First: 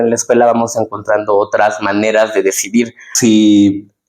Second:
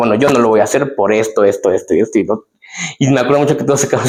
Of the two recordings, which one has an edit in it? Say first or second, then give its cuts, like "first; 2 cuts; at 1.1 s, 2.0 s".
first; 1 cut; at 3.0 s